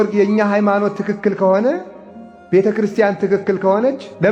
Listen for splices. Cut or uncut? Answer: uncut